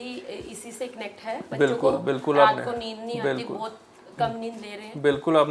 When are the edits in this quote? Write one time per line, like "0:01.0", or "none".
none